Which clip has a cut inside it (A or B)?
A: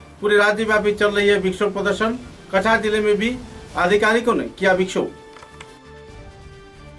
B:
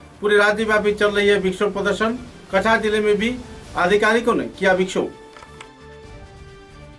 A